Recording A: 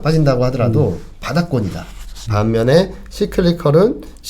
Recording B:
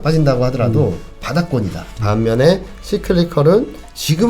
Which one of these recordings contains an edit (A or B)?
B